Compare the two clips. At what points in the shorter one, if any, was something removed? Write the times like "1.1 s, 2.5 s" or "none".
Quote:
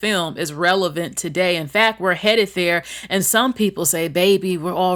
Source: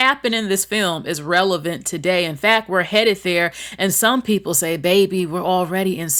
none